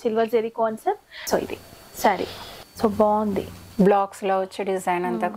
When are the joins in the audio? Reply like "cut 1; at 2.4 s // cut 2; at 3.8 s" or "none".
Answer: cut 1; at 1.1 s // cut 2; at 2.7 s